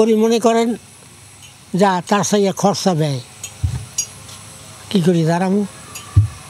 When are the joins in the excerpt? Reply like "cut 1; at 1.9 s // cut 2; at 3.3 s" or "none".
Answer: none